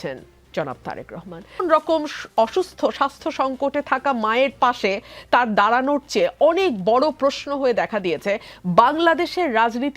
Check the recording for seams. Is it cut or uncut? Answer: cut